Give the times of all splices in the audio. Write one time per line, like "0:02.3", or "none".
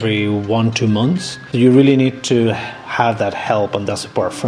0:01.4